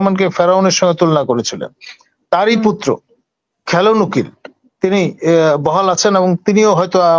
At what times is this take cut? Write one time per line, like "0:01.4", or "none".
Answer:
none